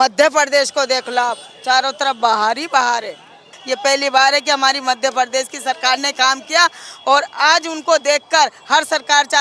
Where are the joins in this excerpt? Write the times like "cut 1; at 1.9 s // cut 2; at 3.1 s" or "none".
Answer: cut 1; at 3.5 s